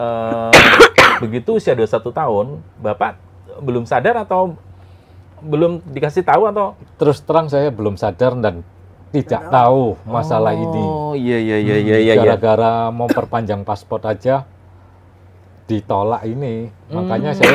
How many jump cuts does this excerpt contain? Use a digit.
0